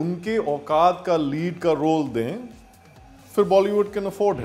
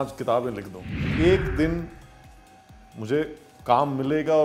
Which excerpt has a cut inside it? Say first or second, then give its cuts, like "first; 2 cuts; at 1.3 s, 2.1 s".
second; 1 cut; at 1.1 s